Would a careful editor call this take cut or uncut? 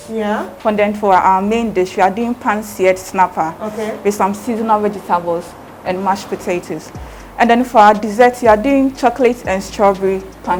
uncut